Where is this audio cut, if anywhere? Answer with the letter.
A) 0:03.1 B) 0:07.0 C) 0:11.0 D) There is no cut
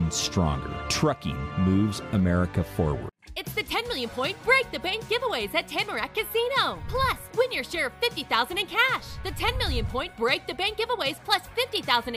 A